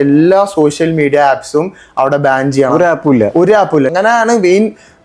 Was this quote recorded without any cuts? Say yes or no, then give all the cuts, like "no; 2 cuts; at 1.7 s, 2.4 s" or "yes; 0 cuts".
no; 1 cut; at 3.9 s